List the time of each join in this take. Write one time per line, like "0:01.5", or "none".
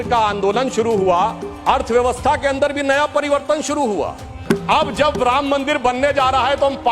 0:04.3